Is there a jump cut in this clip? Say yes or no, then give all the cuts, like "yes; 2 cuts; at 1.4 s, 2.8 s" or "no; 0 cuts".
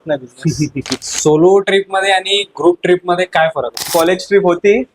yes; 2 cuts; at 1.1 s, 3.8 s